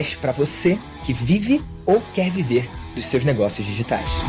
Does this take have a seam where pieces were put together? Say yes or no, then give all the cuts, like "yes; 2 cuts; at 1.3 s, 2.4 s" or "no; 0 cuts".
no; 0 cuts